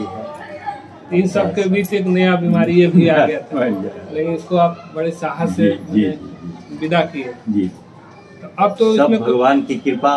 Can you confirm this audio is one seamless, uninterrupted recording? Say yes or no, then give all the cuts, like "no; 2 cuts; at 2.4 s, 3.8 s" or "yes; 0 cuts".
yes; 0 cuts